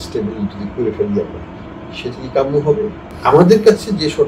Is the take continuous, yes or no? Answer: no